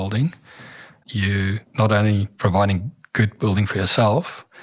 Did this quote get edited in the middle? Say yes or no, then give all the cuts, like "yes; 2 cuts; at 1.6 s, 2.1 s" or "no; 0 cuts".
yes; 1 cut; at 1.3 s